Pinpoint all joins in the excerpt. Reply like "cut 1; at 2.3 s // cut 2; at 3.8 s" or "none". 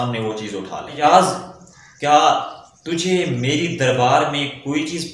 cut 1; at 1.0 s